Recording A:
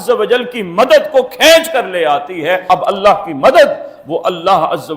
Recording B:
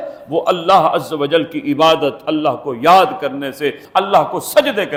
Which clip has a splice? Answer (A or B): A